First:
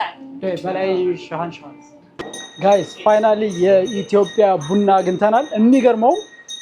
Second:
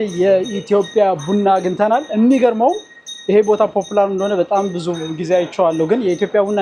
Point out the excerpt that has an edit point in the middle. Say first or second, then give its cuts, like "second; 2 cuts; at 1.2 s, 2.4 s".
first; 1 cut; at 2.4 s